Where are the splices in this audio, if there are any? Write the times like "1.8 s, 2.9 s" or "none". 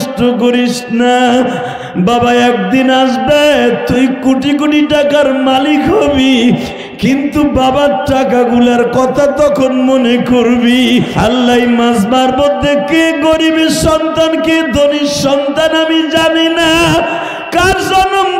11.1 s